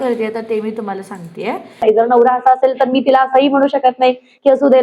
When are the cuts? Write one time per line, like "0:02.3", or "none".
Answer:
0:01.8

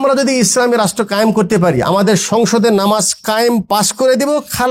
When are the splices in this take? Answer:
none

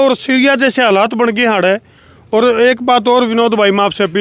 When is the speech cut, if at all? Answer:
none

